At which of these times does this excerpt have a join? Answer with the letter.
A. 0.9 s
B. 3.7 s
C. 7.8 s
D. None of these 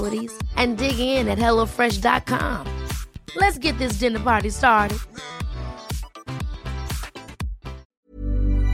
C